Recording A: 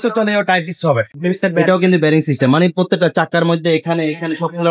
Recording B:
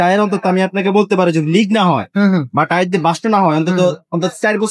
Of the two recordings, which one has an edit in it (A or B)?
A